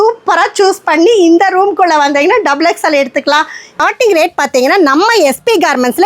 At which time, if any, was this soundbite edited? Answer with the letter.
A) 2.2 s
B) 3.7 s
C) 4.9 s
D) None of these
B